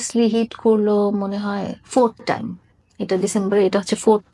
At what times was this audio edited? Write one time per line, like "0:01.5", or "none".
none